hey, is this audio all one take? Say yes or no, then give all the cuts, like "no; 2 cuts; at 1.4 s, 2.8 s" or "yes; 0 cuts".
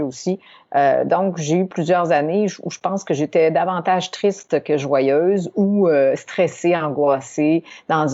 yes; 0 cuts